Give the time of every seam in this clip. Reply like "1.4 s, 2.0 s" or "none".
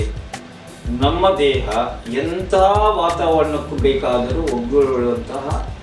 none